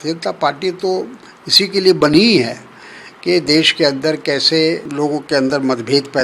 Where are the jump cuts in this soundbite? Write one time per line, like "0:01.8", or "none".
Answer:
0:04.9